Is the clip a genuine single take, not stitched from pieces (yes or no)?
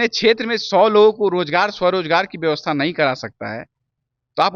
yes